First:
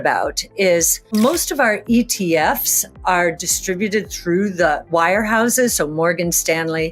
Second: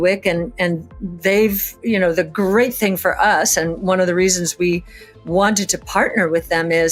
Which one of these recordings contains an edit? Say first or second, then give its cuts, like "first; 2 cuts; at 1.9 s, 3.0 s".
first; 2 cuts; at 1.1 s, 4.8 s